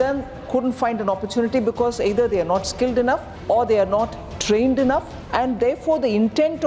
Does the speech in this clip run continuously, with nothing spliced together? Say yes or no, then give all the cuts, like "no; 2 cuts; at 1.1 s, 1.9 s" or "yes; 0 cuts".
no; 2 cuts; at 3.3 s, 5.2 s